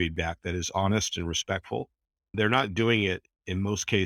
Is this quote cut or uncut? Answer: cut